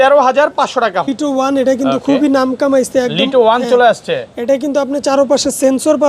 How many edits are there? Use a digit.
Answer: 1